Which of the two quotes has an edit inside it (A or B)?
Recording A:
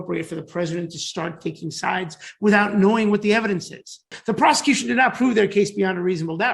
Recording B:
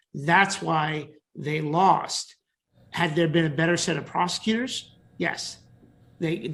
A